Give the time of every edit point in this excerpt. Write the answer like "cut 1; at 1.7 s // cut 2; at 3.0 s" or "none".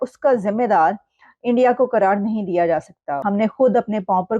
cut 1; at 3.2 s